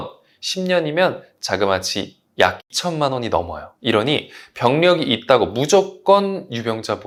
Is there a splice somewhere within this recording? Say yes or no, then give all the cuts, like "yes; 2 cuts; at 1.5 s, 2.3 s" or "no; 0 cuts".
no; 0 cuts